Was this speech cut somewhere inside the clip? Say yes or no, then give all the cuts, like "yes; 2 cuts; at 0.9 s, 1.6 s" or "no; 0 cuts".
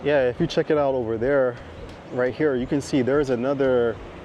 no; 0 cuts